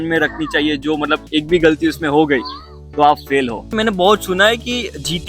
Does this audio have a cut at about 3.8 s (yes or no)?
yes